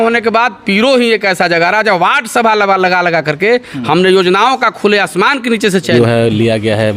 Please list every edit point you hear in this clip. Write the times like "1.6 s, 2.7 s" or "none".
5.9 s